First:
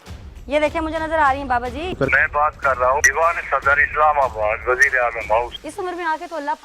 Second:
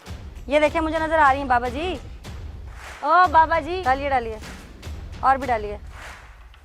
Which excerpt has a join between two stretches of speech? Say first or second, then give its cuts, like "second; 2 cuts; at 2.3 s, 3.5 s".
first; 2 cuts; at 2.0 s, 5.6 s